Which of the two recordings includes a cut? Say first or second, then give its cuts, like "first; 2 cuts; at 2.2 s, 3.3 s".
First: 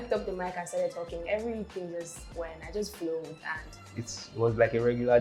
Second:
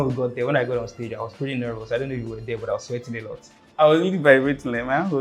second; 1 cut; at 3.6 s